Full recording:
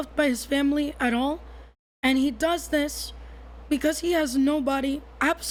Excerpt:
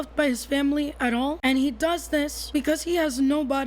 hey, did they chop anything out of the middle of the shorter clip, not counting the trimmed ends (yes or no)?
yes